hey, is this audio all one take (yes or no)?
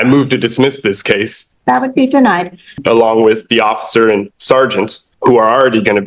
no